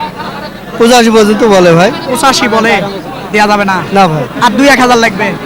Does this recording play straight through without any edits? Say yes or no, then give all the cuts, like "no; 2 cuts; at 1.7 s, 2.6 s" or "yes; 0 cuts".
yes; 0 cuts